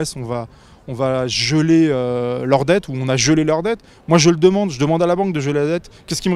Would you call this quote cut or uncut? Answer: uncut